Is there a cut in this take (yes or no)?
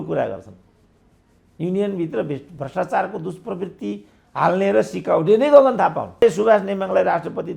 yes